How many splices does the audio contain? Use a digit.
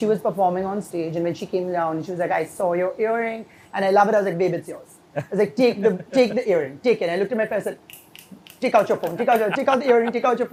0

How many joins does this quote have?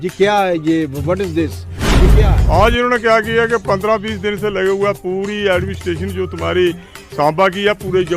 1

